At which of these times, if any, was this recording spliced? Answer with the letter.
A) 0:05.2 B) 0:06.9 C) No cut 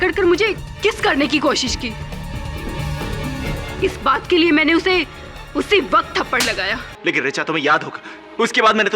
B